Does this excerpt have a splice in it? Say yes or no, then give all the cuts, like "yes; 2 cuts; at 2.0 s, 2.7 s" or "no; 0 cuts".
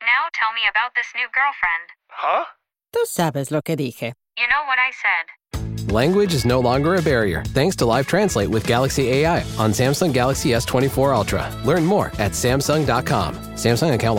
no; 0 cuts